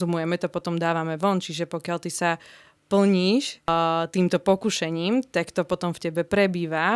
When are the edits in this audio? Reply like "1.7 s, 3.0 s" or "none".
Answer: 3.7 s

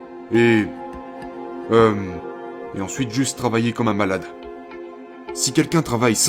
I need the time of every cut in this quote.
4.9 s

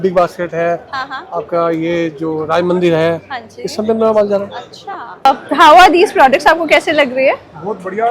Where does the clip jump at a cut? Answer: 5.2 s

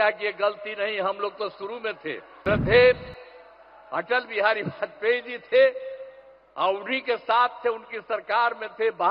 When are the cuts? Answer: 2.3 s

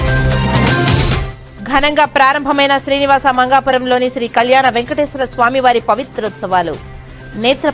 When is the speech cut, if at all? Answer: none

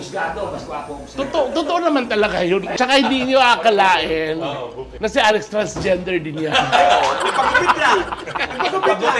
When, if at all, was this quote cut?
2.7 s

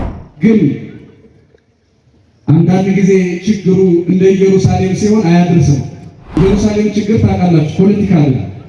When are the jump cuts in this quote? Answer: 6.4 s

